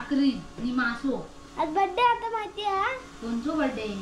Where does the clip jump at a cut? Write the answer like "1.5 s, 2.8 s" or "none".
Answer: 1.4 s